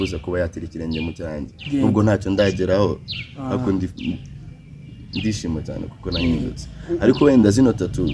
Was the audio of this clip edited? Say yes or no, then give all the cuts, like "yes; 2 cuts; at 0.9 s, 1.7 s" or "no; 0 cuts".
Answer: no; 0 cuts